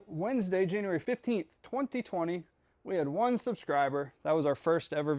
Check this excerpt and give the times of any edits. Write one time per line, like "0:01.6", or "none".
0:01.0